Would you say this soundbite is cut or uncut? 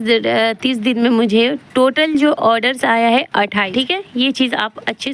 uncut